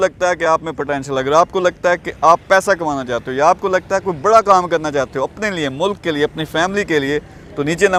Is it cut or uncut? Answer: uncut